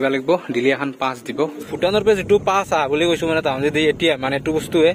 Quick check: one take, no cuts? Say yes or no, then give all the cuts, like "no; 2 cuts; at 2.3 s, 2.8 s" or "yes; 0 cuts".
no; 1 cut; at 1.6 s